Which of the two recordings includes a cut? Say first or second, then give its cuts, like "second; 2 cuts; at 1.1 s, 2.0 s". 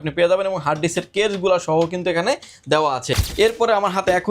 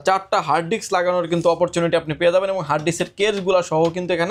first; 1 cut; at 3.2 s